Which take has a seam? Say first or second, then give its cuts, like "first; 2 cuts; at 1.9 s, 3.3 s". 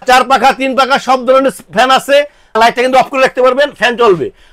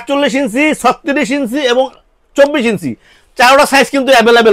first; 1 cut; at 2.6 s